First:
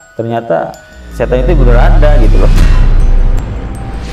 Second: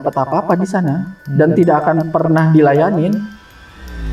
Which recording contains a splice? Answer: second; 1 cut; at 1.2 s

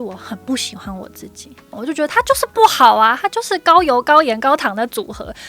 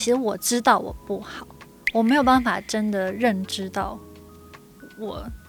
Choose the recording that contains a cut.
first; 1 cut; at 1.8 s

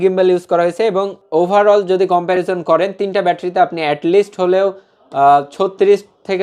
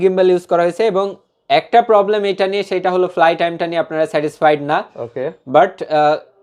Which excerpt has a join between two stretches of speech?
first; 1 cut; at 1.2 s

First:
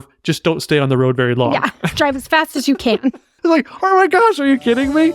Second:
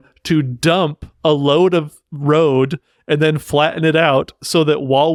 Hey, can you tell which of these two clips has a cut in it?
first; 1 cut; at 3.3 s

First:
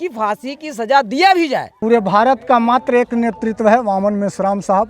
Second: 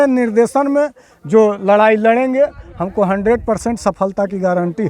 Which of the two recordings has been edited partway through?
first; 1 cut; at 1.7 s

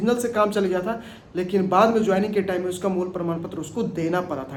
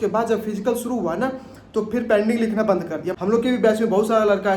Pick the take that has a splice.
second; 1 cut; at 3.1 s

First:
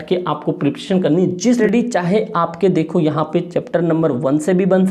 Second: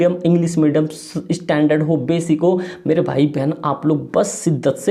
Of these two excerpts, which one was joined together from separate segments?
first; 1 cut; at 1.6 s

